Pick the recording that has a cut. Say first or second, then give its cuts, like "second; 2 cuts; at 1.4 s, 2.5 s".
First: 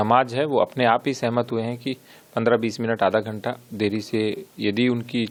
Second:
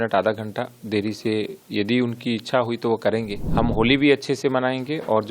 second; 1 cut; at 3.4 s